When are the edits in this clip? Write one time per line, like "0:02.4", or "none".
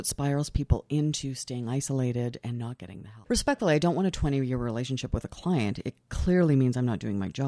0:03.2